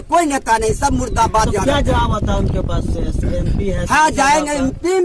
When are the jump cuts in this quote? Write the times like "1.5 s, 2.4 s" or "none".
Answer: none